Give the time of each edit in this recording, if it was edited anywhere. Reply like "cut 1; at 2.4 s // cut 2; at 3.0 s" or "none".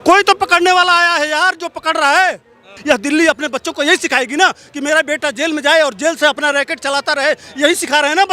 cut 1; at 2.7 s